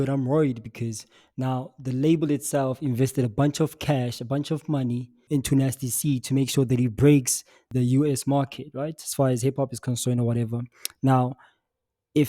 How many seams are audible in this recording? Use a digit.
2